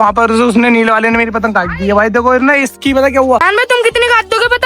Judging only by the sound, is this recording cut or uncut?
cut